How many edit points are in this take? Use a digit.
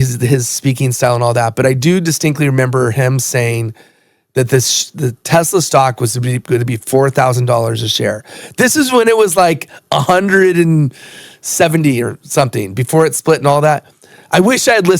0